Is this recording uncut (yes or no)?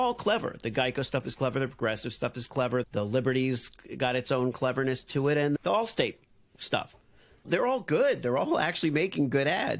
no